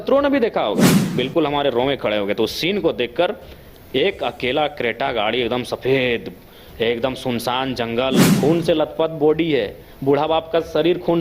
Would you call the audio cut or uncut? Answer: cut